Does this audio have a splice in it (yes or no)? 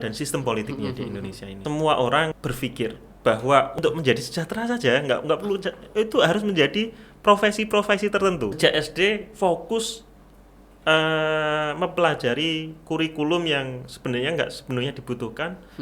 yes